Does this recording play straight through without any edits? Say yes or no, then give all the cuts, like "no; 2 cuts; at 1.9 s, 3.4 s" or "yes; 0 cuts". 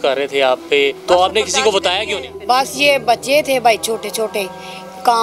no; 2 cuts; at 1.0 s, 2.3 s